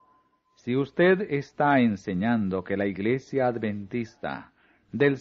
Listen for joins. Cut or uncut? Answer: cut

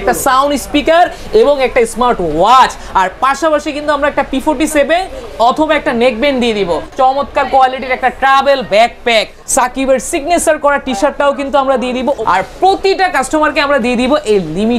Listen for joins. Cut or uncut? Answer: cut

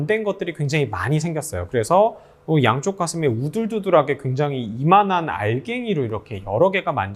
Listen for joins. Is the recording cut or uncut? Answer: uncut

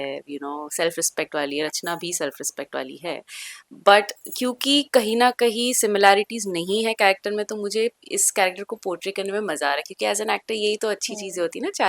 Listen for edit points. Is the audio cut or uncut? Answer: uncut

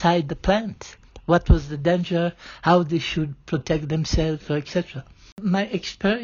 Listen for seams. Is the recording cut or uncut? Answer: cut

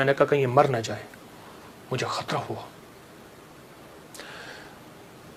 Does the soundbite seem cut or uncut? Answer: uncut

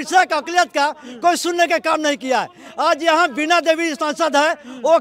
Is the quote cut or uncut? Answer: uncut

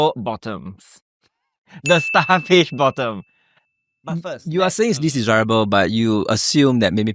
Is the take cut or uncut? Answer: uncut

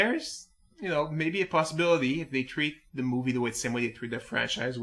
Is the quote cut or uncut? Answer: uncut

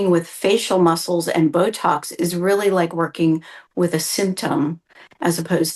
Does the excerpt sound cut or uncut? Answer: uncut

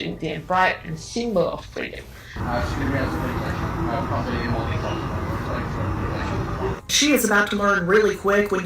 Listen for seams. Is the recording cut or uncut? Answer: cut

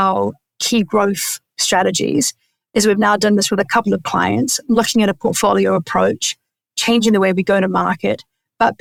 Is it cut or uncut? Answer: uncut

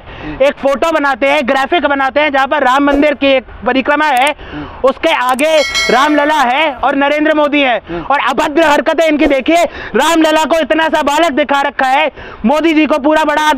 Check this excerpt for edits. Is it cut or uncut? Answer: uncut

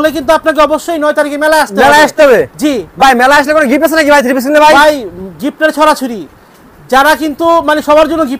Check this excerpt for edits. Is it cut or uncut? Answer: uncut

